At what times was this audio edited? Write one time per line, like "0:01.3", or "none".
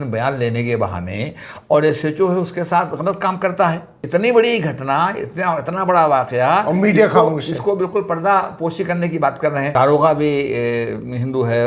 0:03.9
0:09.7